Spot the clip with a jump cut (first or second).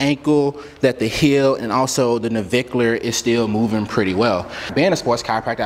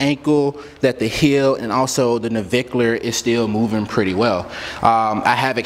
first